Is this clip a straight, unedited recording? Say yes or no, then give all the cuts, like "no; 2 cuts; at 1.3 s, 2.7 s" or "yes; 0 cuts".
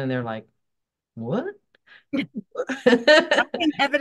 yes; 0 cuts